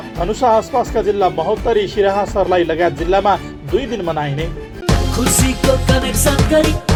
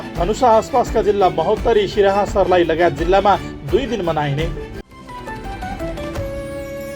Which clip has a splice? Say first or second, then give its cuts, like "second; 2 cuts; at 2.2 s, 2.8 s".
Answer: second; 1 cut; at 4.7 s